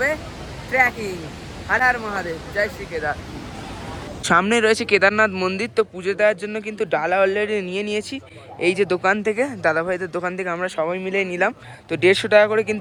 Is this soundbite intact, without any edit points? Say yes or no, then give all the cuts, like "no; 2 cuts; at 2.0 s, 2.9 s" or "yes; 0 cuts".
yes; 0 cuts